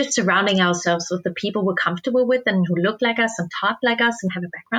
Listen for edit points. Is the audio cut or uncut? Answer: uncut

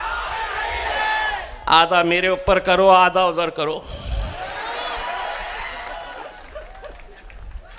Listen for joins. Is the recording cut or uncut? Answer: uncut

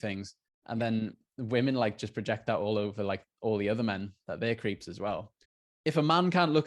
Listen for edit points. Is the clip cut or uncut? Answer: cut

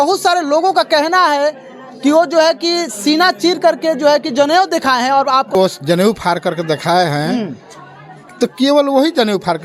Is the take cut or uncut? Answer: cut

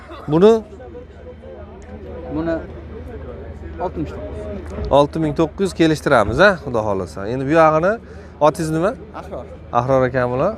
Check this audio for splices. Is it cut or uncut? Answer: uncut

